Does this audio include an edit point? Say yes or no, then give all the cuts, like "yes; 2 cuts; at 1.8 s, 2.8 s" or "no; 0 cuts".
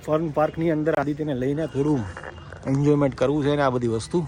no; 0 cuts